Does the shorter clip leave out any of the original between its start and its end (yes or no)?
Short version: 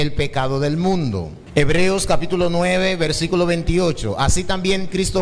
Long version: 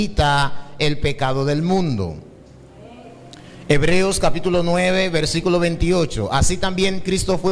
yes